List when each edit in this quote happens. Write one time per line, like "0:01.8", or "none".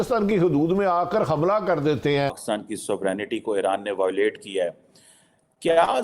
0:02.4